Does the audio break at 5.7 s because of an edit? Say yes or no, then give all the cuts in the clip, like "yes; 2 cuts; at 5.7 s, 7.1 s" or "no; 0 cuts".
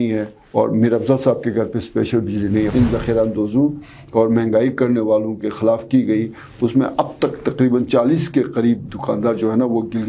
no; 1 cut; at 2.7 s